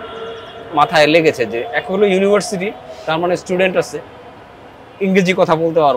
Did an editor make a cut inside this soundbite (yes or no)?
no